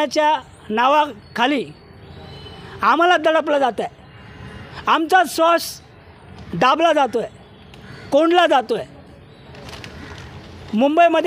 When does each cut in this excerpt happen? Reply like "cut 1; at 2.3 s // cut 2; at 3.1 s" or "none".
none